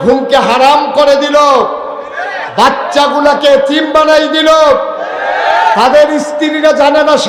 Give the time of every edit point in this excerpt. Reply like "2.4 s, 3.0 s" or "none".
none